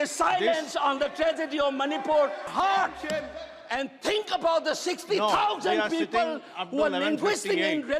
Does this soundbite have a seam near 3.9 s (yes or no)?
no